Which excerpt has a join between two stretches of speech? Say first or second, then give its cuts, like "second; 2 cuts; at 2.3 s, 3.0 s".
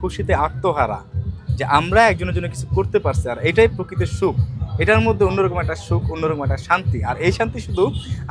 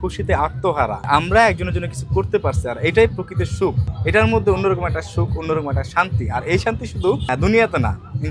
second; 3 cuts; at 1.0 s, 3.9 s, 7.3 s